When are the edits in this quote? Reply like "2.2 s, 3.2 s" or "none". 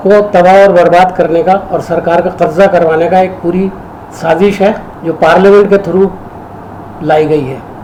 none